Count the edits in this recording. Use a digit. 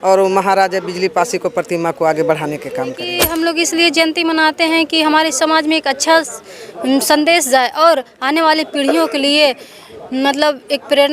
1